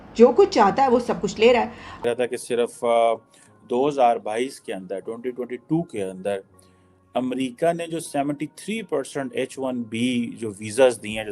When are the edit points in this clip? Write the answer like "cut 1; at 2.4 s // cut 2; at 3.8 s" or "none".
cut 1; at 2.0 s

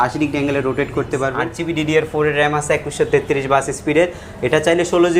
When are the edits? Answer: cut 1; at 1.5 s

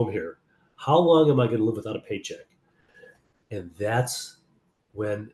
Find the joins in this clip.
none

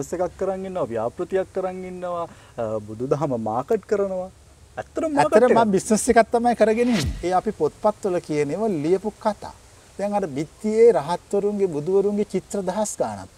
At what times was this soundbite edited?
cut 1; at 7.1 s

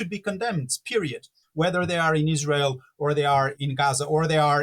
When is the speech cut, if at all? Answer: cut 1; at 1.4 s // cut 2; at 3.6 s

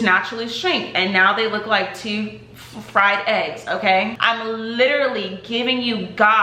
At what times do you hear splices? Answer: cut 1; at 4.2 s

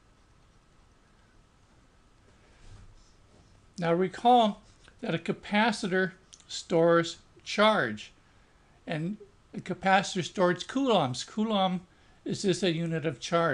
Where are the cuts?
cut 1; at 2.3 s

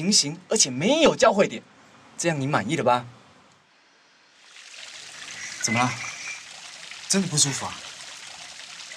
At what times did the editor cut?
cut 1; at 4.6 s

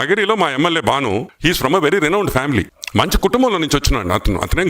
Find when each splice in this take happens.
cut 1; at 1.3 s // cut 2; at 2.8 s

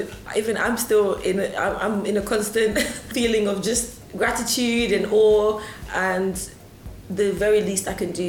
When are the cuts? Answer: cut 1; at 3.1 s

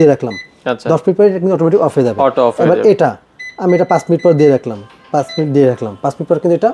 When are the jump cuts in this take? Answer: none

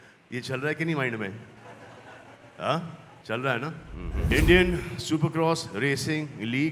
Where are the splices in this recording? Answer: cut 1; at 4.2 s

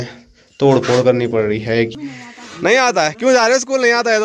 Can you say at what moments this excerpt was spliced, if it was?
cut 1; at 1.9 s

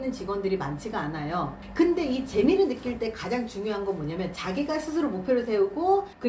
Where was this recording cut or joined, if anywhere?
none

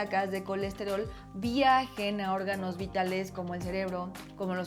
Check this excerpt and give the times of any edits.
none

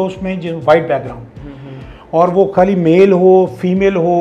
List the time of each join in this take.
none

